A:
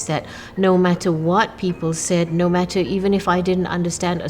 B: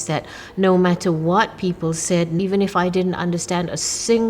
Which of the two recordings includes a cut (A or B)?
B